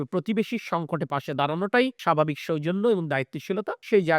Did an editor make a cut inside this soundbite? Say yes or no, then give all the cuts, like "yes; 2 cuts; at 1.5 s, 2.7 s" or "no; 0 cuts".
yes; 1 cut; at 2.0 s